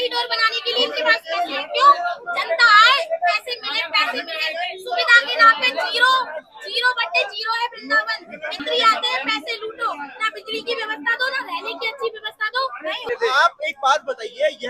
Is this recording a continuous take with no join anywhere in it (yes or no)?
yes